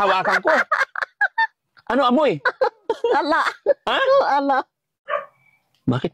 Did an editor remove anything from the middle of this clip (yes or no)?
yes